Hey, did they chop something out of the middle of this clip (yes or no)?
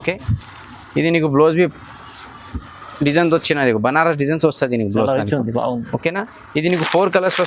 no